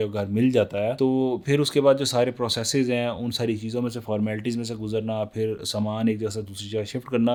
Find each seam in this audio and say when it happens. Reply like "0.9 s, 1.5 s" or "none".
none